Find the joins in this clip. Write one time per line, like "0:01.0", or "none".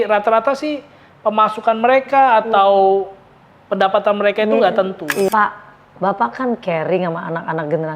0:05.3